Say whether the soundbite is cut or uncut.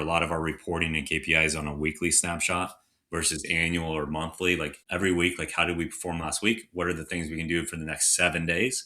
cut